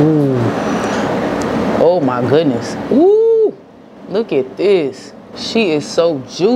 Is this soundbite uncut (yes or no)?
yes